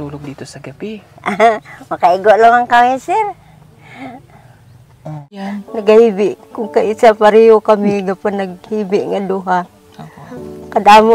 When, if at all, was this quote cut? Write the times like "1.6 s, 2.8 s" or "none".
5.5 s

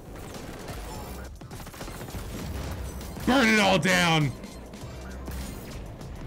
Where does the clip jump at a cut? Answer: 1.3 s

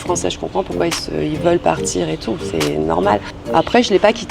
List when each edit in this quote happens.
3.4 s

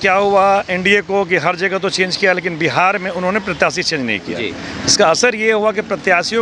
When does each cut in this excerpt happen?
none

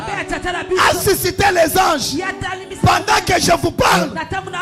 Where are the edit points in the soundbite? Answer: none

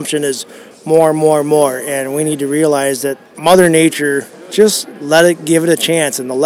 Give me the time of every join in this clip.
3.2 s, 4.3 s

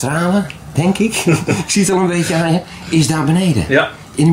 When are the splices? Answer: none

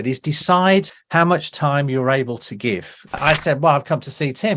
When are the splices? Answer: 1.0 s, 3.2 s

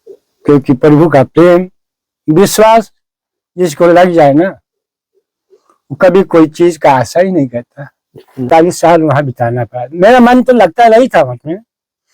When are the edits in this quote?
8.5 s

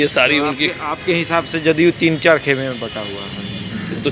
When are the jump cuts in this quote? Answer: none

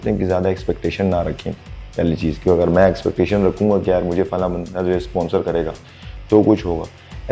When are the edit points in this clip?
none

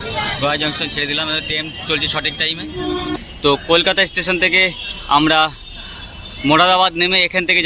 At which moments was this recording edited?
3.2 s

